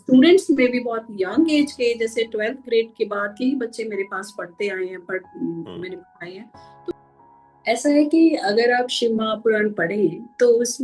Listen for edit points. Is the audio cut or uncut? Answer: cut